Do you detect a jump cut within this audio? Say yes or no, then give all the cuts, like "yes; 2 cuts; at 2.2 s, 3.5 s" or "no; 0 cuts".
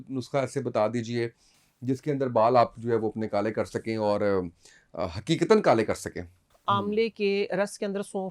yes; 1 cut; at 6.5 s